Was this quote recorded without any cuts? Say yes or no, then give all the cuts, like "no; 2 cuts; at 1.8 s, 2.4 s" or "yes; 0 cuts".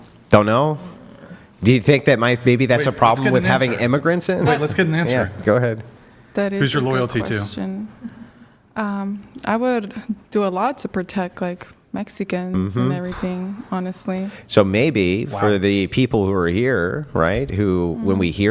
yes; 0 cuts